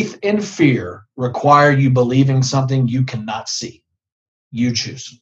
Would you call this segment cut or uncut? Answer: uncut